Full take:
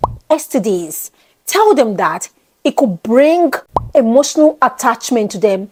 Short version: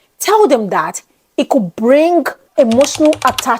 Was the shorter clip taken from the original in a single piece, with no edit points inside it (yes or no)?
no